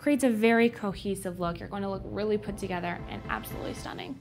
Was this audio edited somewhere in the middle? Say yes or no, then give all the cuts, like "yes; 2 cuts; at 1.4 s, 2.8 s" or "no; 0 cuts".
no; 0 cuts